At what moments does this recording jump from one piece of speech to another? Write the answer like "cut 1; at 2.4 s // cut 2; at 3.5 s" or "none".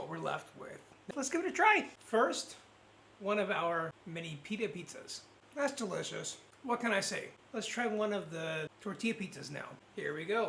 cut 1; at 1.0 s // cut 2; at 4.0 s // cut 3; at 5.3 s // cut 4; at 7.3 s